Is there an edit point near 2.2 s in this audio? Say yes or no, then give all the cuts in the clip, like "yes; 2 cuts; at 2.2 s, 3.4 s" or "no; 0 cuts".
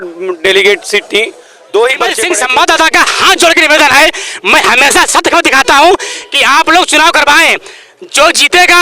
yes; 1 cut; at 2.2 s